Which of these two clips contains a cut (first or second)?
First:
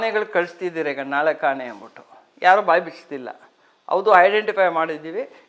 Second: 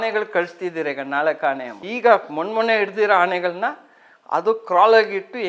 second